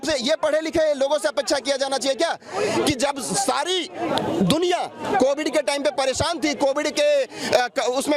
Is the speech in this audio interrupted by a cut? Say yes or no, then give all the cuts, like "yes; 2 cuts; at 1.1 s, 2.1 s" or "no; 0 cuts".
no; 0 cuts